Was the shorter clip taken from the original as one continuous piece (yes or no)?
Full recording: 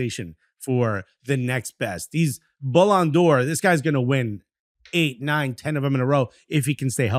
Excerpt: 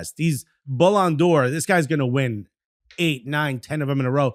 yes